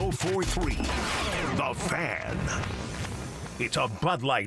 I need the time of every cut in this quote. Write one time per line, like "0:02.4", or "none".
0:03.5